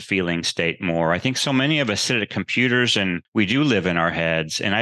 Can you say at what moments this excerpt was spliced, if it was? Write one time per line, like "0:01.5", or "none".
0:03.2